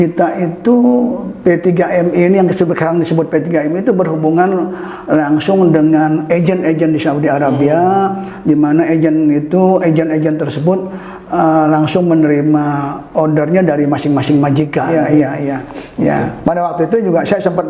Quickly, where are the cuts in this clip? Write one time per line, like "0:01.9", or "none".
0:14.9